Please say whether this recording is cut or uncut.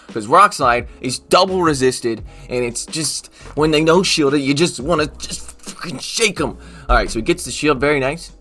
uncut